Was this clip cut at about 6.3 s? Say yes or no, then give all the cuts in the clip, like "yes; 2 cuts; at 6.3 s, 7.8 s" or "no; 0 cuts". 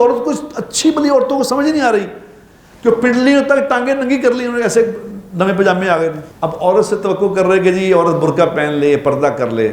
yes; 1 cut; at 6.3 s